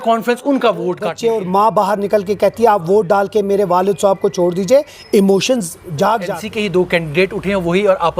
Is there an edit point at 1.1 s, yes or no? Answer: yes